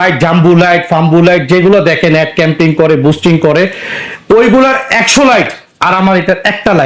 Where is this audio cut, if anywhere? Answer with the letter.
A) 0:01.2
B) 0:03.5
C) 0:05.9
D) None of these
D